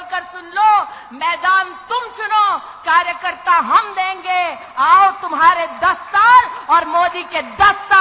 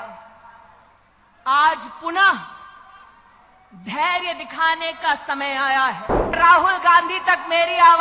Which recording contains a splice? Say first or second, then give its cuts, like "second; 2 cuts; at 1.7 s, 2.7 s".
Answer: second; 1 cut; at 6.4 s